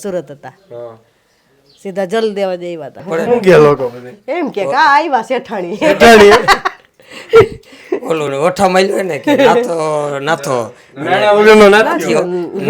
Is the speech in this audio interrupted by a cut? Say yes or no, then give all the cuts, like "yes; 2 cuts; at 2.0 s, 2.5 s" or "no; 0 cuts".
yes; 1 cut; at 3.0 s